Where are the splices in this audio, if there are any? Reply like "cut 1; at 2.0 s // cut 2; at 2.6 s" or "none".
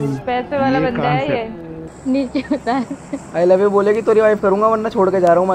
cut 1; at 1.8 s